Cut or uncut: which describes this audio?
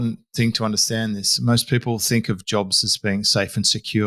uncut